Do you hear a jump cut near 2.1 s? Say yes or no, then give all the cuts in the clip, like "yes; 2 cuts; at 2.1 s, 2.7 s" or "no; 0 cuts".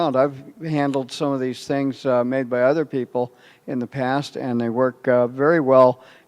yes; 1 cut; at 2.1 s